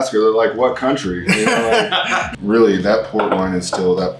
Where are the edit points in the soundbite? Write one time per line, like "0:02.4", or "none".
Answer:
0:02.3